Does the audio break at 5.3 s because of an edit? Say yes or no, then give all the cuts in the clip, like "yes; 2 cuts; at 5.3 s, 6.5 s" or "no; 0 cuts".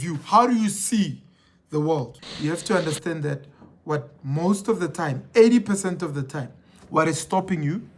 no; 1 cut; at 2.2 s